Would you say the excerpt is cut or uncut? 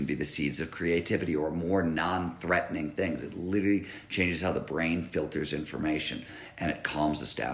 uncut